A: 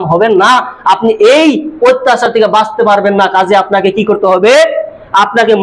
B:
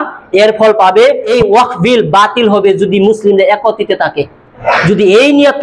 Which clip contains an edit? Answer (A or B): B